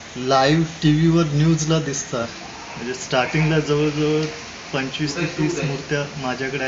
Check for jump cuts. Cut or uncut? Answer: cut